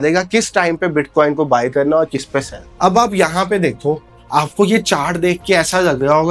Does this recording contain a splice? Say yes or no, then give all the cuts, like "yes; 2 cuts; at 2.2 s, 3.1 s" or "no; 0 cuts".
no; 0 cuts